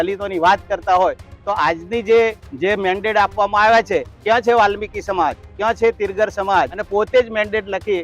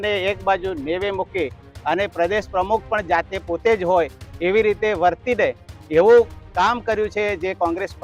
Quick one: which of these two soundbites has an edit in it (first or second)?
first